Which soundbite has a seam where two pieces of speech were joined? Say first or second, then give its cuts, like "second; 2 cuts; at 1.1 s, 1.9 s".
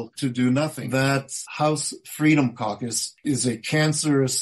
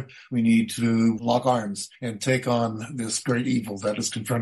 first; 2 cuts; at 1.1 s, 3.2 s